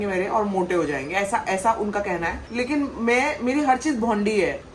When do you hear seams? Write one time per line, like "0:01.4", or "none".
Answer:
0:02.4